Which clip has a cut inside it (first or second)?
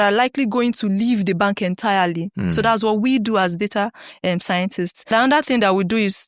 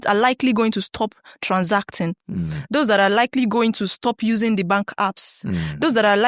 first